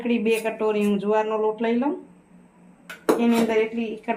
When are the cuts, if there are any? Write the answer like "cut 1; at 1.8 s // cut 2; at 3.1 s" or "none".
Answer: none